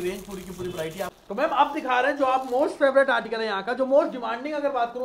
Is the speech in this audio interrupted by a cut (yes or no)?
yes